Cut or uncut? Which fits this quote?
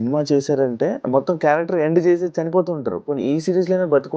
cut